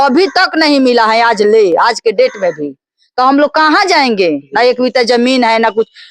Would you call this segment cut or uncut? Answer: uncut